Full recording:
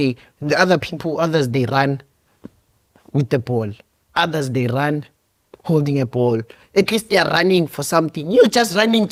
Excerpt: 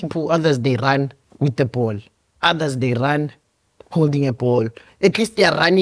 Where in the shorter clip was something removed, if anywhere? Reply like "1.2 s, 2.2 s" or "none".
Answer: 1.2 s